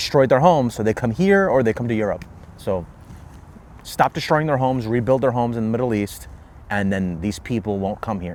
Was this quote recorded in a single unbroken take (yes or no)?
yes